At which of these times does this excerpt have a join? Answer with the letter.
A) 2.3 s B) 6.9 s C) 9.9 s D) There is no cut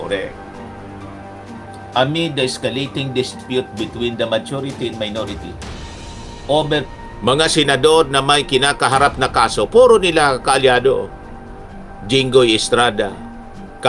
B